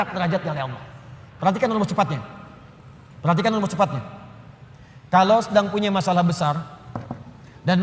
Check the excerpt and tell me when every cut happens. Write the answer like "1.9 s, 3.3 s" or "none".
1.3 s

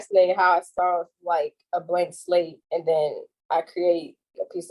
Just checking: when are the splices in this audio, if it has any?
none

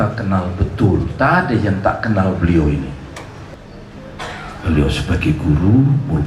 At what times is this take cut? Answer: none

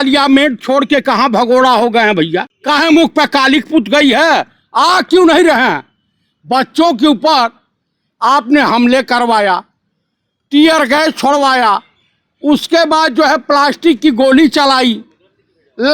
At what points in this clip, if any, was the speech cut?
2.5 s

